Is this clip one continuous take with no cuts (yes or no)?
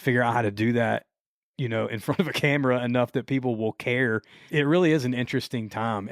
no